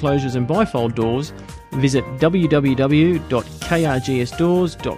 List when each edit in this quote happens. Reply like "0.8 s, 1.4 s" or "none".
none

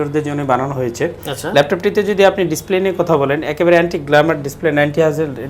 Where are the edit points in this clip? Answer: none

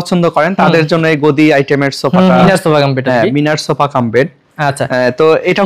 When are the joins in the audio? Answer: 2.5 s

